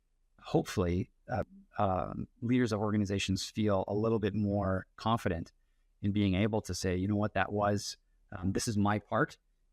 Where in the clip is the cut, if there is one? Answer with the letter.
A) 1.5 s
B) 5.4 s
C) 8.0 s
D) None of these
A